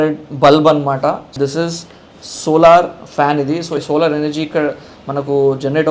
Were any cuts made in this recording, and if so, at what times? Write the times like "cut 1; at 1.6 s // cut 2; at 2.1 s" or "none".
cut 1; at 1.3 s // cut 2; at 3.8 s